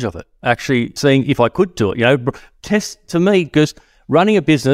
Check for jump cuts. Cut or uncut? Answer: cut